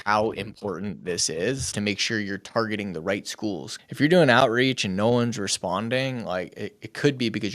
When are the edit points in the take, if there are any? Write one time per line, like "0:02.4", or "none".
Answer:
0:01.6
0:03.7